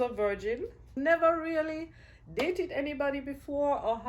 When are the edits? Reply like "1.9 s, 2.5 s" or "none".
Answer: 0.9 s